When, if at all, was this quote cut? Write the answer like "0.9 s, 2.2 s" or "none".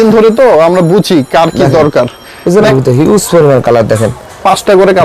2.7 s